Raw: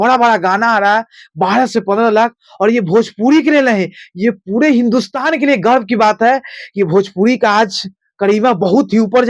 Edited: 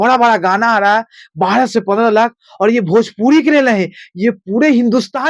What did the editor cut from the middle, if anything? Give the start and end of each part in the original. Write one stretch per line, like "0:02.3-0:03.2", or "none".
none